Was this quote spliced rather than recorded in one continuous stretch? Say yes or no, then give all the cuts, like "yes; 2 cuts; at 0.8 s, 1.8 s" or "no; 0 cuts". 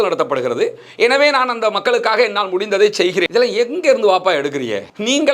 yes; 1 cut; at 3.3 s